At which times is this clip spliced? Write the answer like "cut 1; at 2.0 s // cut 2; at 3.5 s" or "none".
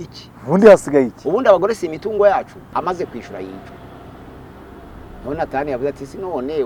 cut 1; at 2.6 s